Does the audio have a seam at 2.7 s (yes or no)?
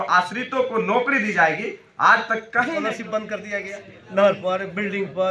yes